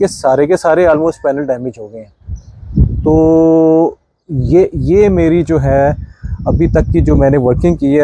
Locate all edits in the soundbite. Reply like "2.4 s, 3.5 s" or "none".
none